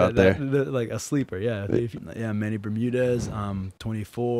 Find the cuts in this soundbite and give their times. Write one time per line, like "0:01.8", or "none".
0:02.0